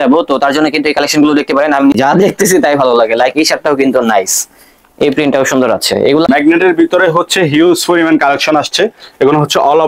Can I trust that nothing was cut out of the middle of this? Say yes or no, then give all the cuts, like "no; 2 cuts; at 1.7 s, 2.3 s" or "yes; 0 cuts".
no; 2 cuts; at 1.9 s, 6.3 s